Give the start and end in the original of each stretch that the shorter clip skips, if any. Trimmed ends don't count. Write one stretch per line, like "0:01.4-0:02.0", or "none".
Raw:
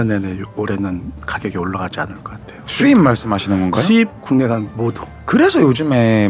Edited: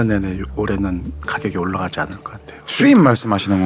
none